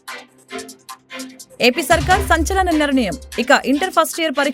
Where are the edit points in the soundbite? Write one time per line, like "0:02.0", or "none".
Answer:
0:01.4